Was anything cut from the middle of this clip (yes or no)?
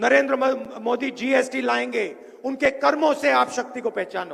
no